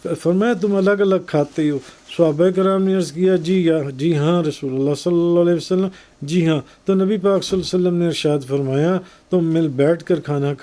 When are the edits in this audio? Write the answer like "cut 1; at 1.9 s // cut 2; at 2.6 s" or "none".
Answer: none